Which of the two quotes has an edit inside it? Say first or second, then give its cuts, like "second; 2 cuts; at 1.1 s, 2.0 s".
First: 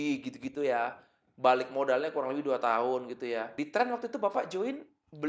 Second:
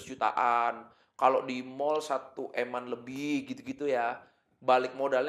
first; 1 cut; at 3.5 s